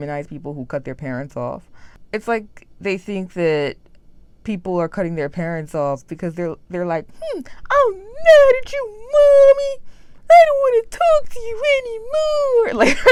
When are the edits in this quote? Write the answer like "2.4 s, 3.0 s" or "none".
none